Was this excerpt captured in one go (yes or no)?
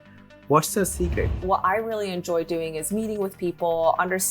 no